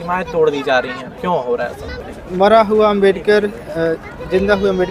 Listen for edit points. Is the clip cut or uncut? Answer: cut